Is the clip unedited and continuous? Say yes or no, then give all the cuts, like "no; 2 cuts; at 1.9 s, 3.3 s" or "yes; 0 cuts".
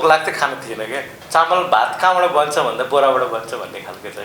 no; 1 cut; at 1.2 s